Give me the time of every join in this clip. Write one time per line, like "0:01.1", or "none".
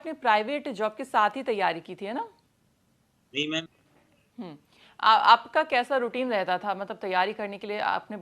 0:03.6